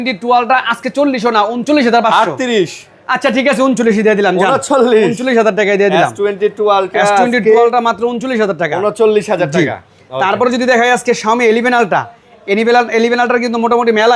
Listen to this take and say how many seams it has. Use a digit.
0